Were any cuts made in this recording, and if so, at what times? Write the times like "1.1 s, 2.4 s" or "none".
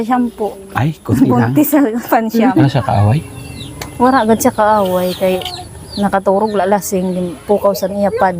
2.7 s